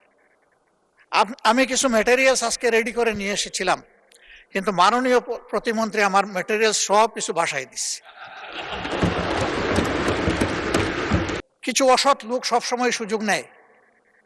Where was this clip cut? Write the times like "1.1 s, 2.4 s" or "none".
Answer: 11.4 s